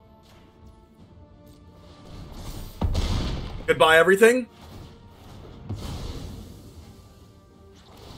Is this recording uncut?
yes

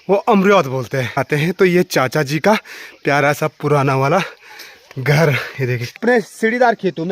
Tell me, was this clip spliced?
yes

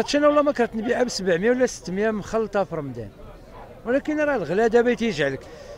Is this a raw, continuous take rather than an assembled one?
yes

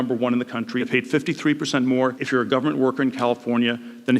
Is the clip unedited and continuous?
no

